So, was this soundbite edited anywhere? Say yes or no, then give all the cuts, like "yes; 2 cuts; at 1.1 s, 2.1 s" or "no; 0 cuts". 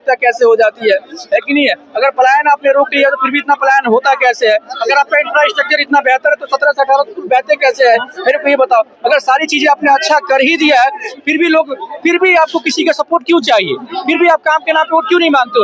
no; 0 cuts